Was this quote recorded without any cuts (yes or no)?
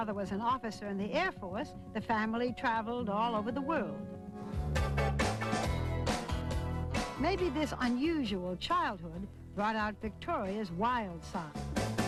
yes